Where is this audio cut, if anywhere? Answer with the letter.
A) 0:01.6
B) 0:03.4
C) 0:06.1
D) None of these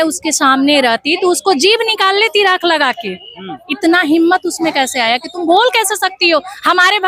D